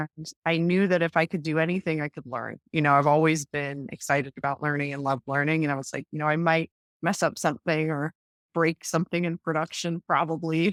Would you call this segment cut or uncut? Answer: uncut